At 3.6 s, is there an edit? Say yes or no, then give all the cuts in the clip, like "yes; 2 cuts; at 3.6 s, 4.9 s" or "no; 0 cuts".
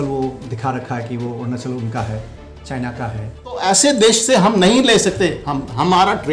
yes; 1 cut; at 3.6 s